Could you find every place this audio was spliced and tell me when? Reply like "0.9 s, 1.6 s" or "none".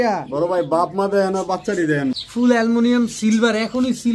2.2 s